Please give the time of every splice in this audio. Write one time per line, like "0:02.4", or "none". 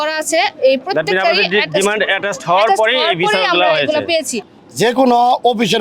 0:04.4